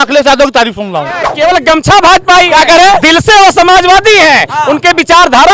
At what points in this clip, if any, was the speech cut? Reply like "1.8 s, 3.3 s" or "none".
1.2 s